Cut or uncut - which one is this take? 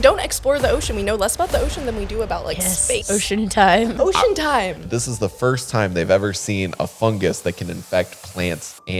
cut